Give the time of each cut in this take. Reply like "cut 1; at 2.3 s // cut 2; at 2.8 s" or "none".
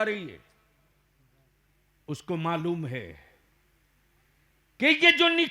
cut 1; at 1.6 s